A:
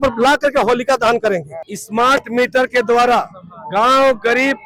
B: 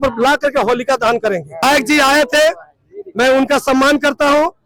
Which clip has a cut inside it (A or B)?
A